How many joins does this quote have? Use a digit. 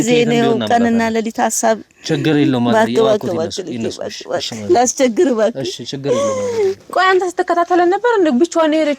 1